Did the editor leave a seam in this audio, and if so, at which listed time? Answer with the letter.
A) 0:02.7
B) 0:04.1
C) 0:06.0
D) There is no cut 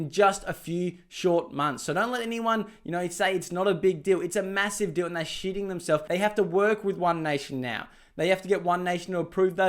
C